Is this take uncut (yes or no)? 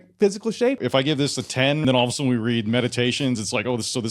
no